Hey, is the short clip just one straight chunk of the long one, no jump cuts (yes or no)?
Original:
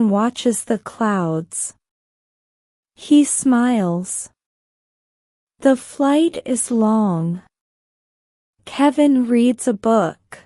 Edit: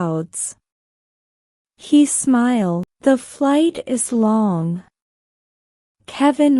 no